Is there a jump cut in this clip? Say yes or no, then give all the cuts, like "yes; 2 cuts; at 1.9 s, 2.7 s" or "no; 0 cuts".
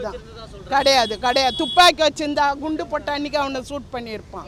no; 0 cuts